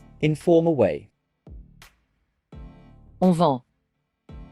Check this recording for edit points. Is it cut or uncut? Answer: cut